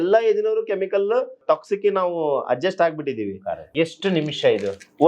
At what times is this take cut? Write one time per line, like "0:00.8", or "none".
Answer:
0:01.4
0:03.7